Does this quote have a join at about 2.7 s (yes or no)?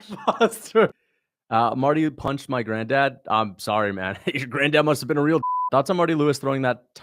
no